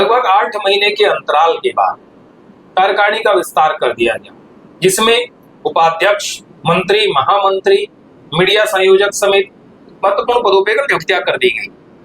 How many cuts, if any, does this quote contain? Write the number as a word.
zero